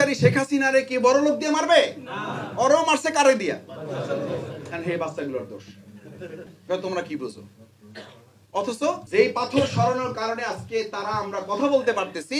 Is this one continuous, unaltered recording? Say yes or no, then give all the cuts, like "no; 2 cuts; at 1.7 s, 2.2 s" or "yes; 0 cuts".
no; 2 cuts; at 6.5 s, 9.0 s